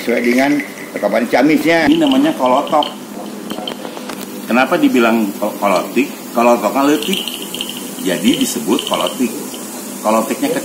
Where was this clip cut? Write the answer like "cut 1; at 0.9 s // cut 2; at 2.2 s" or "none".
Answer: cut 1; at 1.9 s